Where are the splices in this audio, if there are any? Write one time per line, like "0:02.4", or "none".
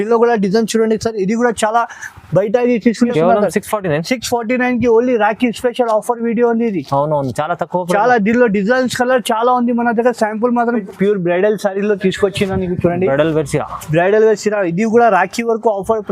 0:03.1
0:10.8